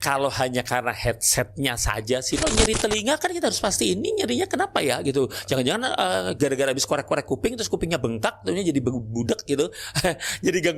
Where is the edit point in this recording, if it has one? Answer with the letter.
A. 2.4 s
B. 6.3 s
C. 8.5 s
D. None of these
A